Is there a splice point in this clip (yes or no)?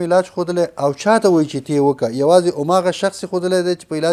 no